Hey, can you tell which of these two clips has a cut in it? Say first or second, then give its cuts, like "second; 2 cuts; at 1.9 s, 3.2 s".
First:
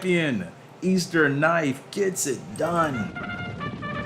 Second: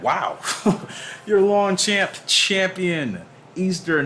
first; 1 cut; at 3.1 s